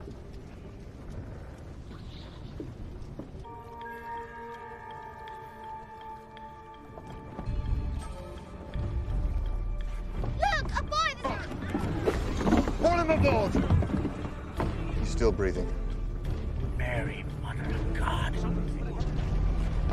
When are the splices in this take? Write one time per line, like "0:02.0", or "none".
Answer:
0:07.5

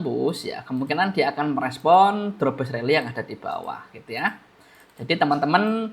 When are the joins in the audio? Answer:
none

